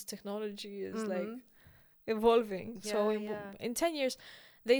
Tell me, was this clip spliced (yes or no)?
no